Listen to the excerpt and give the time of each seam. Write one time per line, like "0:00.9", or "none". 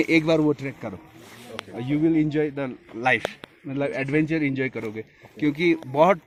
none